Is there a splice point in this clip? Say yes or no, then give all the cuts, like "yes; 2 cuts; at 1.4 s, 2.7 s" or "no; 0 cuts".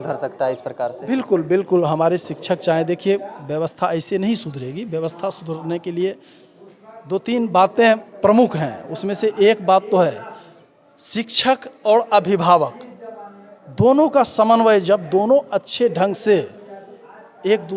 no; 0 cuts